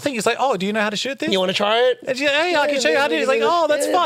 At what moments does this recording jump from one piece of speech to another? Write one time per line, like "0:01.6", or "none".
none